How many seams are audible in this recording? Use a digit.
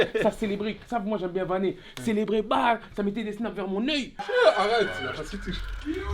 1